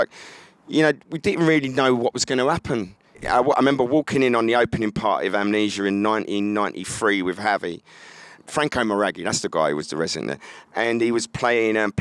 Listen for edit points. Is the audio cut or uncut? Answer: cut